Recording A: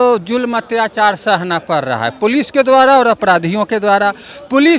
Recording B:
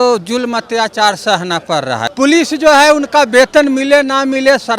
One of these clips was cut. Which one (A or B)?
B